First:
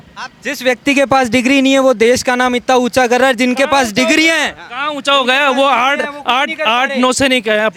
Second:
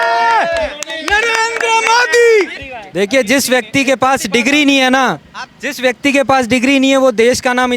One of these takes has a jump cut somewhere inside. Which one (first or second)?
second